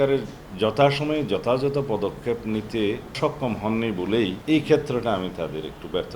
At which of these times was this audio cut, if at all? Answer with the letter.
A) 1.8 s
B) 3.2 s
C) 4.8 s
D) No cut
B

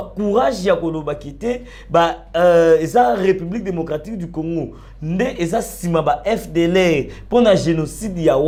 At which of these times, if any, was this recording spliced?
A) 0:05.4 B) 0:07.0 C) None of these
C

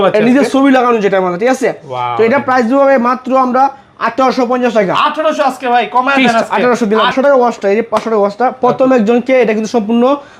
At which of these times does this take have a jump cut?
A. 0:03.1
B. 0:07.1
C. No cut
B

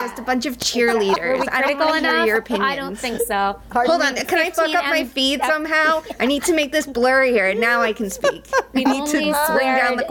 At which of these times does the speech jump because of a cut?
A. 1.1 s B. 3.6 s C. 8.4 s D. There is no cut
D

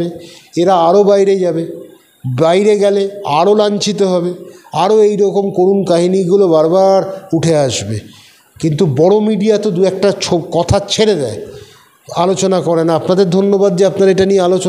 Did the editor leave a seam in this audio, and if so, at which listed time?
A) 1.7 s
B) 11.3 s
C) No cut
C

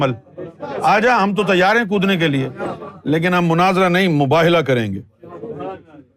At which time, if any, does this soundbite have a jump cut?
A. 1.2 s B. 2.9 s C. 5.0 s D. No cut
B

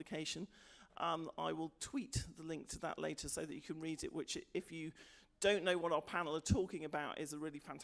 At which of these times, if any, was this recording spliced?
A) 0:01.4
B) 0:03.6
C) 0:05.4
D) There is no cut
B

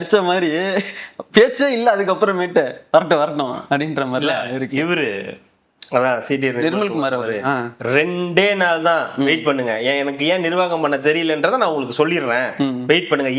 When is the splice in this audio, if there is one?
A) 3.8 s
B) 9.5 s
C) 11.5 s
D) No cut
D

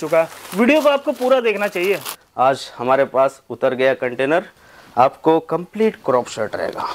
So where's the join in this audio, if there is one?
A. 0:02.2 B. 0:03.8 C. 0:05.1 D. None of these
A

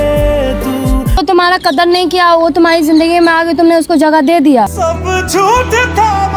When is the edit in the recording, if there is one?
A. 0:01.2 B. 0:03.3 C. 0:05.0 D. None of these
A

